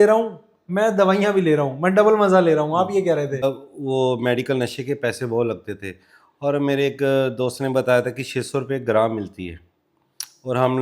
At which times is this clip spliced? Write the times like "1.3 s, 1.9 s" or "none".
3.4 s